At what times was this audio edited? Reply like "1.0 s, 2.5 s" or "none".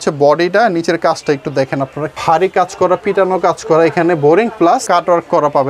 2.2 s, 4.8 s